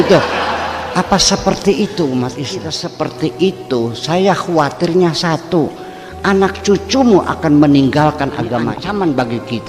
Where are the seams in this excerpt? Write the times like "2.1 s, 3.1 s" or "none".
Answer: 2.8 s, 8.7 s